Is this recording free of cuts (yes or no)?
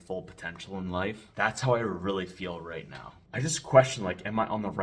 no